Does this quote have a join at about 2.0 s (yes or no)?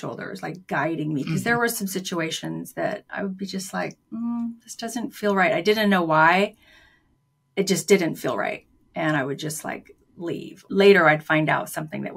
no